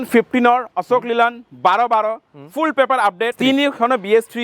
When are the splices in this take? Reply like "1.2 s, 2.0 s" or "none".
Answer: 3.3 s